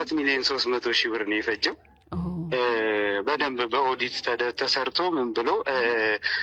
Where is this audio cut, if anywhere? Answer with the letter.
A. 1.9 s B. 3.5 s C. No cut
A